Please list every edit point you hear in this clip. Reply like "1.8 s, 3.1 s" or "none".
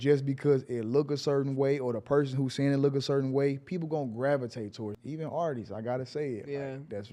5.0 s